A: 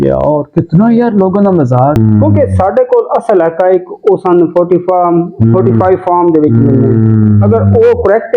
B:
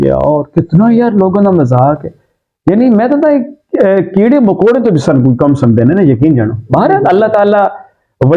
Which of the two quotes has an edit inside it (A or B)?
A